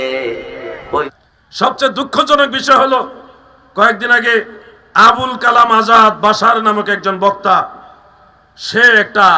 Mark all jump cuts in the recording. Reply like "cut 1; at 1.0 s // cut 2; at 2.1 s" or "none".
cut 1; at 1.1 s